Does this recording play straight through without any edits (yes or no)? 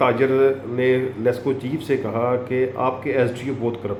yes